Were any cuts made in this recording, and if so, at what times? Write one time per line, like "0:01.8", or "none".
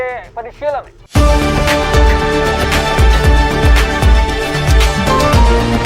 0:01.0